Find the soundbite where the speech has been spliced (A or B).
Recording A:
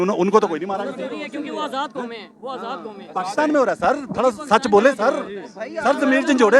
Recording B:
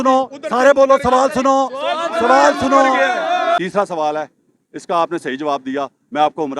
B